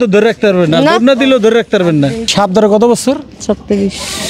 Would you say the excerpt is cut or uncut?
cut